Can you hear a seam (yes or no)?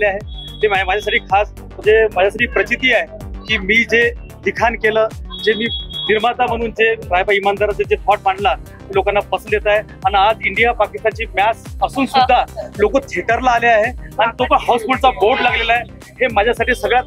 no